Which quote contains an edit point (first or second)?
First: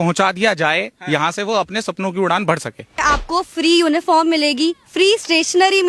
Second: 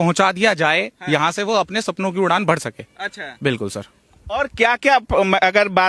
first